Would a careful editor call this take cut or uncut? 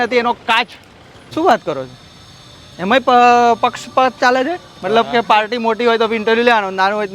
cut